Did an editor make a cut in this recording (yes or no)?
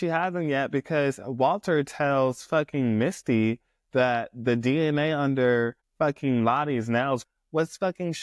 yes